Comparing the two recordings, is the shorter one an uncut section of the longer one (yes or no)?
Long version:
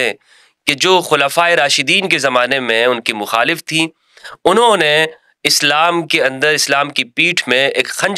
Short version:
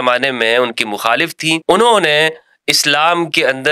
no